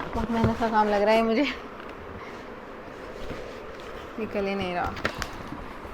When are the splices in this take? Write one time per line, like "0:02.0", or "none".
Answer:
0:05.0